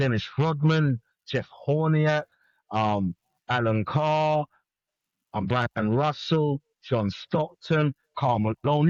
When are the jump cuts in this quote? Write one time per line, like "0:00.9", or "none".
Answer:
none